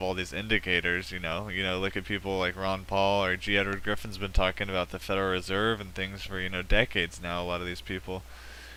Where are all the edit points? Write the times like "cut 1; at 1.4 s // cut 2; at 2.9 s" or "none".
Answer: none